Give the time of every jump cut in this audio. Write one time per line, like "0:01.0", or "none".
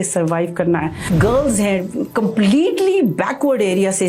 0:01.0